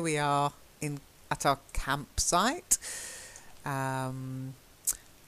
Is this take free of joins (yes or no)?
yes